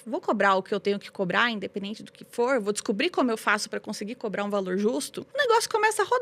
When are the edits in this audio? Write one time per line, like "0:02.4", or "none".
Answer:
0:05.2